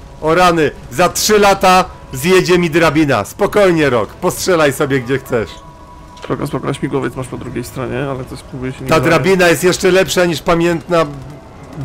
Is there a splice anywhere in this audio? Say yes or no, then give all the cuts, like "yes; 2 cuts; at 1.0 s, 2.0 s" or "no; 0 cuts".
no; 0 cuts